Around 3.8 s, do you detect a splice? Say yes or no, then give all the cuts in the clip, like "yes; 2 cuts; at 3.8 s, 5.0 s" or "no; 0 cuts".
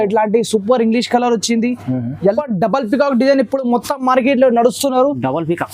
no; 1 cut; at 2.2 s